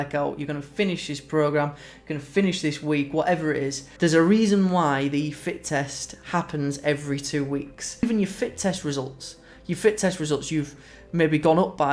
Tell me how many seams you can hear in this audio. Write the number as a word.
two